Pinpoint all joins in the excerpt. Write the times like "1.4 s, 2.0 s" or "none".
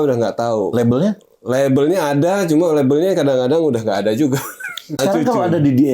5.0 s